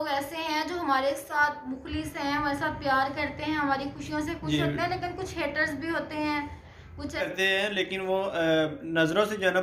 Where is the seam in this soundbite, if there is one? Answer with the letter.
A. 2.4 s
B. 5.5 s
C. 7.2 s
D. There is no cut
C